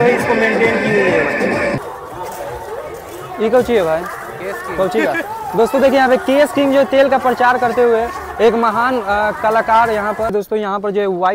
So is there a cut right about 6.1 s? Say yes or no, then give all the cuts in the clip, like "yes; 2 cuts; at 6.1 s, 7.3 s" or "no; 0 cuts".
no; 2 cuts; at 1.8 s, 10.3 s